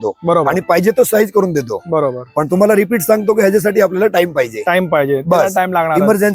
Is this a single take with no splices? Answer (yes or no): yes